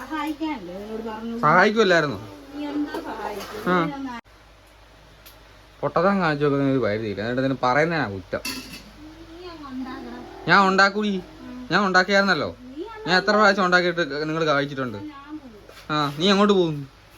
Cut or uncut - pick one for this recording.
cut